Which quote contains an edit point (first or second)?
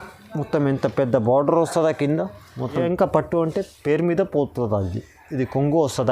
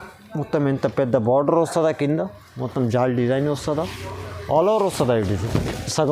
first